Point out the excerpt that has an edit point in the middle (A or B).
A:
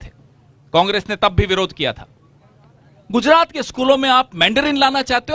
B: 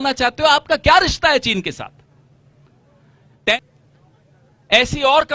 B